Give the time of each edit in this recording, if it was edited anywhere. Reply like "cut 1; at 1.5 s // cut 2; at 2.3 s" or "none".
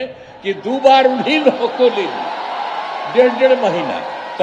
none